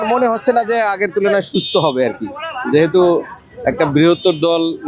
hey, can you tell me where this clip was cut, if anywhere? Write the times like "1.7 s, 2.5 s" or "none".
none